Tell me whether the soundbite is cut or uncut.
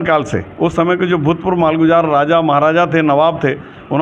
uncut